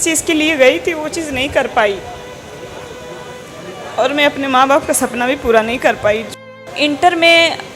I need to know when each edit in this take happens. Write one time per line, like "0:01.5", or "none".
0:06.7